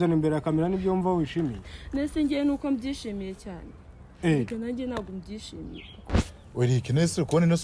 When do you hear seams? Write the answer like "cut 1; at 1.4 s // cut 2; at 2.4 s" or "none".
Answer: cut 1; at 6.1 s